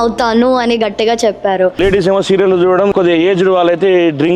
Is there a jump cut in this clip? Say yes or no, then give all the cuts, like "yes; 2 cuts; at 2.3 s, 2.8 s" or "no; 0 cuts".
yes; 2 cuts; at 1.8 s, 2.9 s